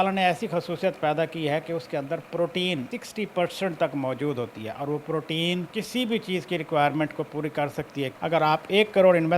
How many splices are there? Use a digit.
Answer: 3